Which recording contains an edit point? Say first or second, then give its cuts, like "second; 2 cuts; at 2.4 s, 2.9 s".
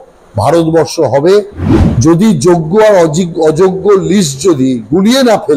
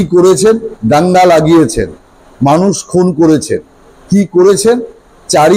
first; 1 cut; at 1.6 s